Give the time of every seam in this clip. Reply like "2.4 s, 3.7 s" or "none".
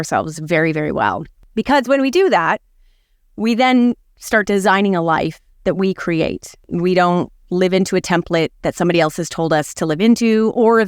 1.5 s, 6.7 s